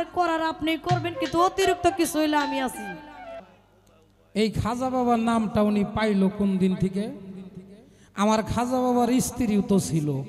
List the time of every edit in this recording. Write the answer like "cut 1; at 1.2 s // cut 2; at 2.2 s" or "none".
cut 1; at 3.4 s